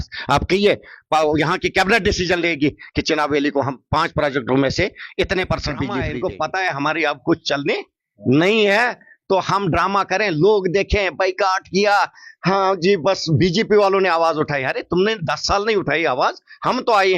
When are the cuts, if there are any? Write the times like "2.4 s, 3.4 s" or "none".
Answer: 6.0 s